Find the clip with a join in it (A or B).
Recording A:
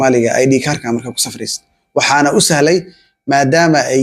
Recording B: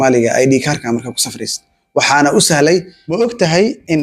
B